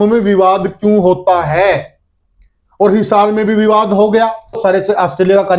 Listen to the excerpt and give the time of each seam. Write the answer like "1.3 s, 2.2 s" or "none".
4.6 s

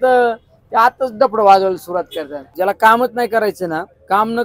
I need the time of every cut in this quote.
2.5 s

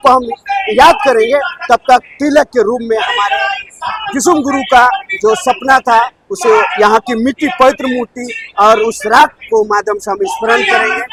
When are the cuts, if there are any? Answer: none

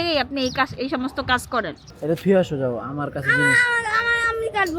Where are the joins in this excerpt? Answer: 1.8 s

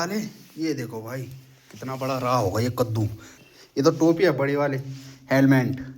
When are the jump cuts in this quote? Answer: 3.3 s

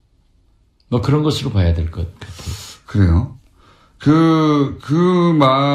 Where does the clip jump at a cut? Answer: none

